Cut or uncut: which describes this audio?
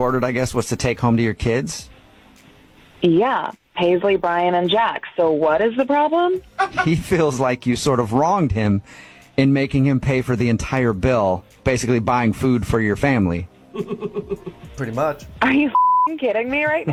uncut